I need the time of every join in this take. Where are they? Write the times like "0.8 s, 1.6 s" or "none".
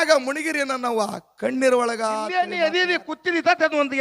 2.3 s